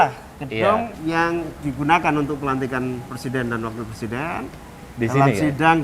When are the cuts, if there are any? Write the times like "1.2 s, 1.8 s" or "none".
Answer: 0.9 s